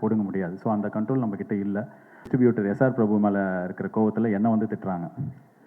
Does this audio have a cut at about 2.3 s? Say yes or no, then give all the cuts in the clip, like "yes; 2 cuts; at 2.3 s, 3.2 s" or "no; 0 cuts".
yes; 1 cut; at 2.3 s